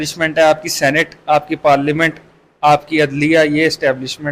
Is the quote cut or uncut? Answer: uncut